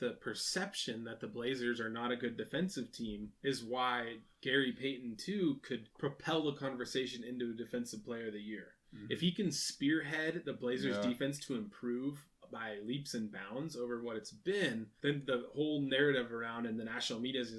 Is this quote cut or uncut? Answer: cut